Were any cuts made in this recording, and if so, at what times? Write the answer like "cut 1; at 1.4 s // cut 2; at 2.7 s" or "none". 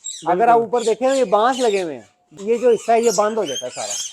cut 1; at 2.3 s